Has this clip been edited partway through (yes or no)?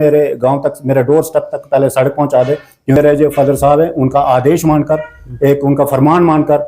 yes